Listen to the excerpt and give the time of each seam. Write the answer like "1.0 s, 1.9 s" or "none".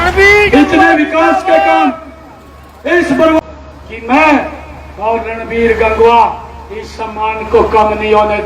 3.4 s

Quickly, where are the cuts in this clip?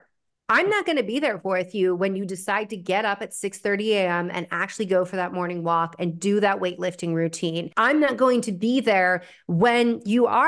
7.6 s

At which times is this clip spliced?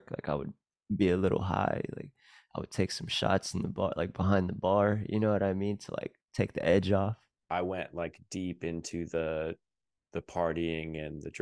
7.3 s

